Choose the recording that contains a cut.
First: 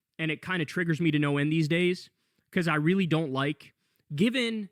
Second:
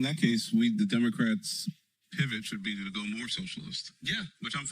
second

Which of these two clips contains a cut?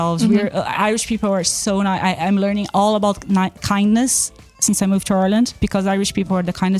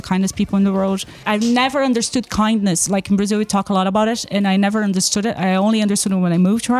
second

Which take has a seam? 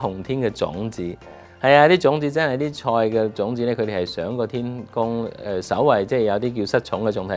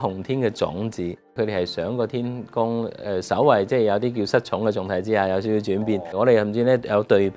second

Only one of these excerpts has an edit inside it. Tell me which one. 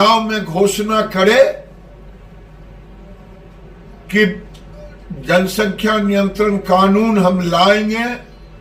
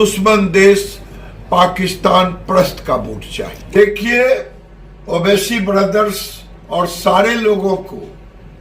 second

